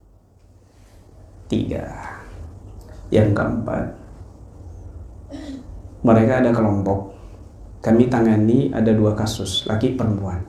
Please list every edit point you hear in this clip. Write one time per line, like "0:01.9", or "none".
none